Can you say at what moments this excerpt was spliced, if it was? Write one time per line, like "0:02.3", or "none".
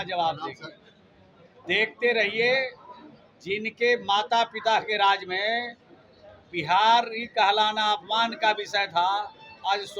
none

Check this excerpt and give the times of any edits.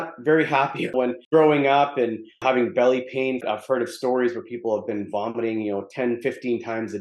0:01.0
0:02.4

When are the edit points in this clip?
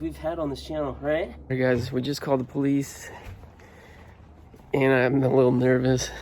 0:01.5

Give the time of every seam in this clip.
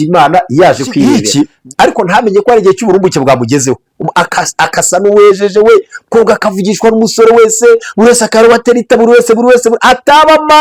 0:01.2

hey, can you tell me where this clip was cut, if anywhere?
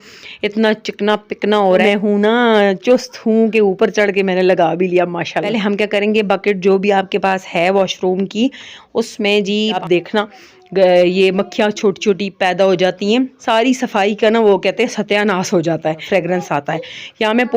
0:01.8
0:05.5
0:09.8
0:13.4
0:16.0

